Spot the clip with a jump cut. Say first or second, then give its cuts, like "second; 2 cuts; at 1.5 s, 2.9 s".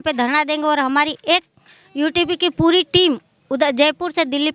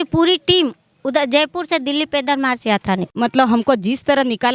second; 1 cut; at 3.1 s